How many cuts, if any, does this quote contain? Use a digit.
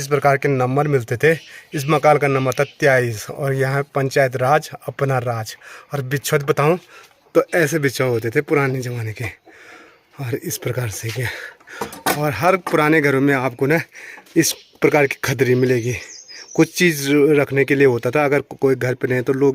0